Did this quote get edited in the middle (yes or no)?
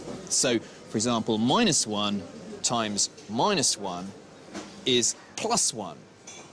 no